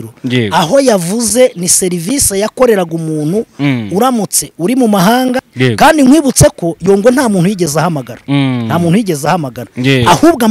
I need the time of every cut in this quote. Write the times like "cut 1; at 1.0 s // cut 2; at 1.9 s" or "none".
cut 1; at 5.5 s